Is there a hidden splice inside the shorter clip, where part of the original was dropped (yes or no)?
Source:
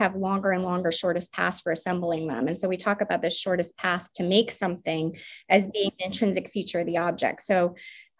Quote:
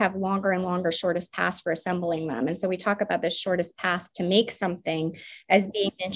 no